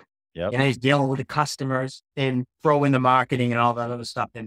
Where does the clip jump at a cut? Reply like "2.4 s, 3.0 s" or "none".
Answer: 2.0 s